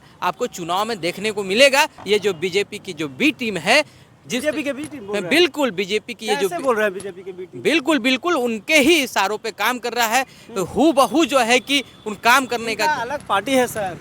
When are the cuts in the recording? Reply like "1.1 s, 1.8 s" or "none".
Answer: 2.0 s